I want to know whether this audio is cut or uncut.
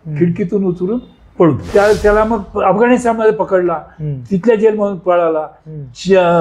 cut